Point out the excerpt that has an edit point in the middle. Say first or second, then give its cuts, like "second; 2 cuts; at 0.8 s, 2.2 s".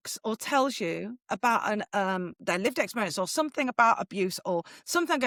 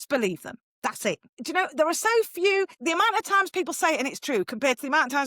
second; 2 cuts; at 1.3 s, 2.8 s